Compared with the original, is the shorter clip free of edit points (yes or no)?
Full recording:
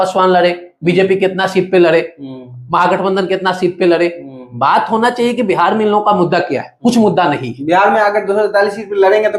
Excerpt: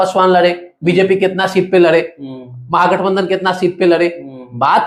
yes